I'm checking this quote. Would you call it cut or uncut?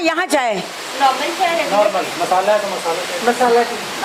uncut